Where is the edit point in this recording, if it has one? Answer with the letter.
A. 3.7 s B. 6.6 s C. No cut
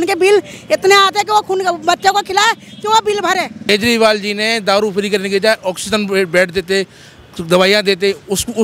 A